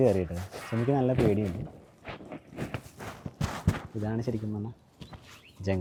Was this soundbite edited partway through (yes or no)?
no